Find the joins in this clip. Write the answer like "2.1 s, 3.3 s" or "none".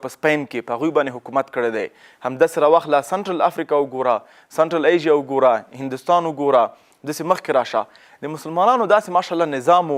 none